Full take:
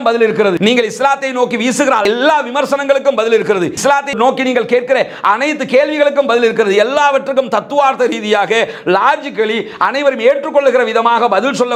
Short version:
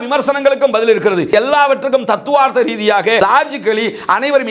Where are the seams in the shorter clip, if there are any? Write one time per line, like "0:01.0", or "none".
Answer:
0:01.3
0:03.2